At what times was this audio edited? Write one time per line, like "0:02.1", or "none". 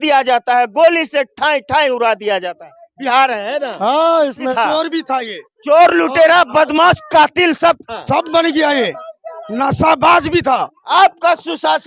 0:04.4
0:10.8